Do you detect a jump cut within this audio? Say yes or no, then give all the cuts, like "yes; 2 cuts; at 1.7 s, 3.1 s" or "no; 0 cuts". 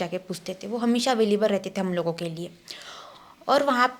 no; 0 cuts